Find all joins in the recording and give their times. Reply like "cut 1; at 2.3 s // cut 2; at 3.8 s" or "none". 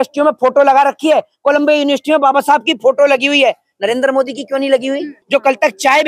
cut 1; at 5.2 s